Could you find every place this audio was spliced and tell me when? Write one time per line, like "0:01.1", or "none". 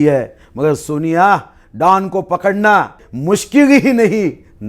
0:03.1